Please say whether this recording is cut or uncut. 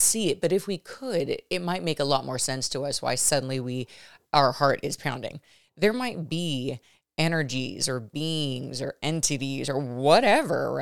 uncut